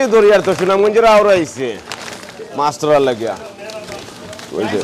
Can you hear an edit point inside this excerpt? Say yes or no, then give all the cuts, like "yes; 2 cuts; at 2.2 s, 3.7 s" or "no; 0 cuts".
no; 0 cuts